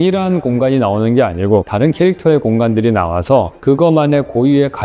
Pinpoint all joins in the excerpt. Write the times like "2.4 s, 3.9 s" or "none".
1.7 s, 3.5 s